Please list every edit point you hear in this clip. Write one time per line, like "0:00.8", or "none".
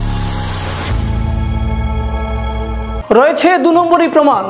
0:02.9